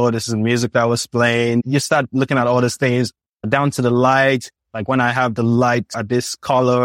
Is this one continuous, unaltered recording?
yes; 0 cuts

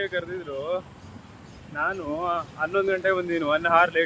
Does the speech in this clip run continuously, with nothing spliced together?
yes; 0 cuts

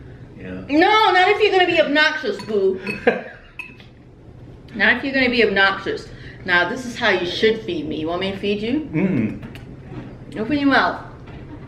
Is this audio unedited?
yes; 0 cuts

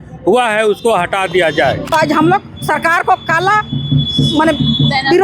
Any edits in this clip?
yes; 1 cut; at 1.8 s

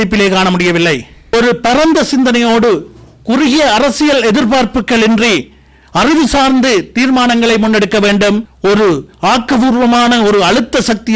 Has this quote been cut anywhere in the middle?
yes; 2 cuts; at 1.3 s, 8.5 s

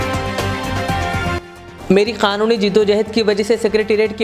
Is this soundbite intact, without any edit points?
yes; 0 cuts

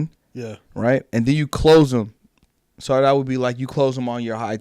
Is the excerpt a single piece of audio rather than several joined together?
yes; 0 cuts

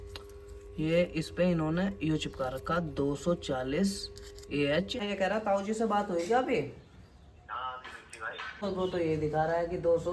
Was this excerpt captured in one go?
no; 2 cuts; at 5.0 s, 8.6 s

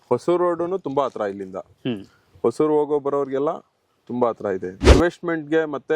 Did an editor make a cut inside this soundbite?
yes; 1 cut; at 4.9 s

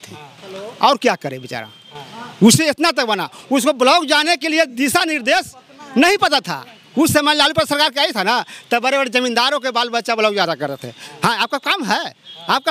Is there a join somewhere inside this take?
no; 0 cuts

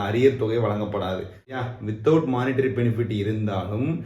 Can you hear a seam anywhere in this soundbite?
yes; 1 cut; at 1.6 s

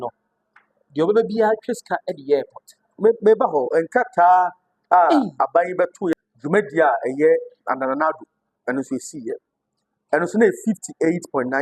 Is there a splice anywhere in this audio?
yes; 1 cut; at 6.1 s

